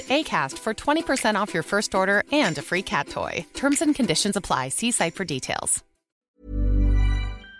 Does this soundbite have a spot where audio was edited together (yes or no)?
yes